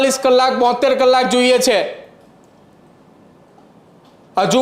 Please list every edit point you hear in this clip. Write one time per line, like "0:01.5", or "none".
none